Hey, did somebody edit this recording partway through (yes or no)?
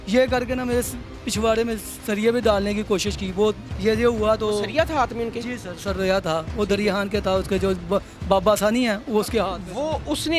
yes